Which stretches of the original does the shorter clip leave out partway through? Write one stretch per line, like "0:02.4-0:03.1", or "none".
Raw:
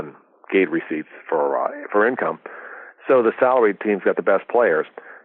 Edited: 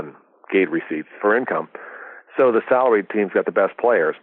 0:01.1-0:01.8

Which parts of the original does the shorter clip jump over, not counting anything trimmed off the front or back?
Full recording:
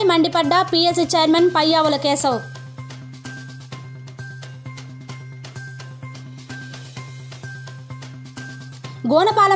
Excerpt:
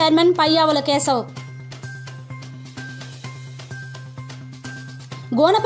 0:02.4-0:05.0

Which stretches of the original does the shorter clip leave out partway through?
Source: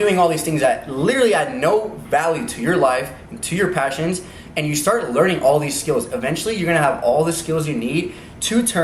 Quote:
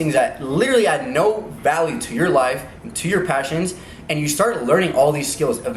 none

